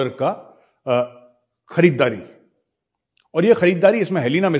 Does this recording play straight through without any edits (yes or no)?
yes